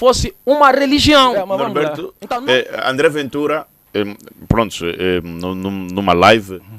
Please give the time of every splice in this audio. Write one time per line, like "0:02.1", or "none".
0:01.5